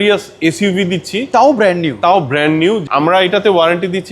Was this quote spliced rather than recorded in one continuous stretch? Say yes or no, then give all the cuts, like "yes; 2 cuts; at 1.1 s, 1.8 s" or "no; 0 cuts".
yes; 1 cut; at 2.8 s